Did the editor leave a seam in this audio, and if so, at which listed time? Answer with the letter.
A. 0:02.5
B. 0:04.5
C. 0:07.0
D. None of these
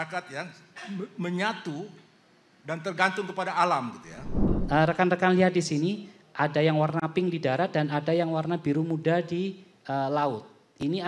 B